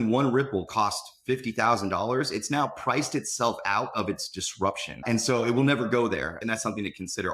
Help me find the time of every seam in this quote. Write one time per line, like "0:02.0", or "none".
0:05.0
0:06.4